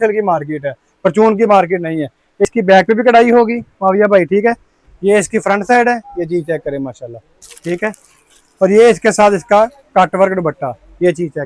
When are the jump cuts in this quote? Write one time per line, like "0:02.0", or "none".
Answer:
0:02.4